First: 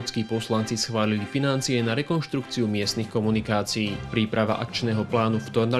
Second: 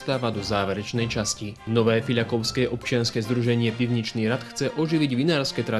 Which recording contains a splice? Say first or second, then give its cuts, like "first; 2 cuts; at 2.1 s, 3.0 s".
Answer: second; 1 cut; at 1.6 s